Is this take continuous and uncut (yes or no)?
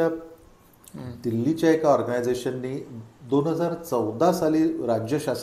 yes